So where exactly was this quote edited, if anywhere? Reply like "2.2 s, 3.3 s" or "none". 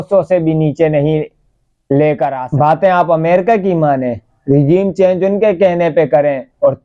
2.4 s